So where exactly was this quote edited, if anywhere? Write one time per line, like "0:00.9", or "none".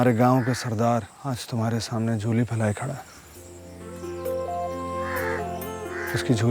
0:01.1